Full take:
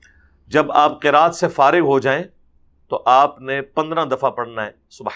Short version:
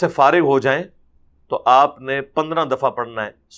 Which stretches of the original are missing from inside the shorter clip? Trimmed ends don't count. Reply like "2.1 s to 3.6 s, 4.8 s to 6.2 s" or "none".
none